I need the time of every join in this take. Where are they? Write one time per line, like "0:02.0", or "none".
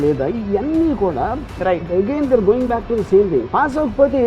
none